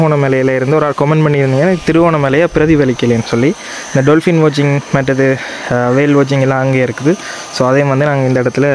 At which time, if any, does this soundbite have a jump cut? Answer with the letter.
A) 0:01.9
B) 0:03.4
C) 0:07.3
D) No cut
D